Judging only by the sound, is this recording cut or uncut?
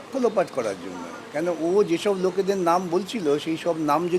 uncut